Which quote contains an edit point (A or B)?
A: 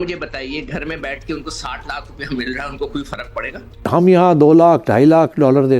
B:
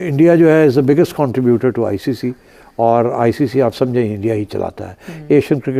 A